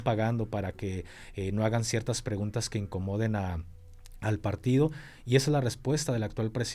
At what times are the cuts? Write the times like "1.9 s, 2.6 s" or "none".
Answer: none